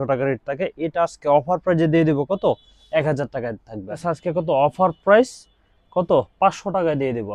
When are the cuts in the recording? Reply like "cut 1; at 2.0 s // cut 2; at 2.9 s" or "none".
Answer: cut 1; at 3.9 s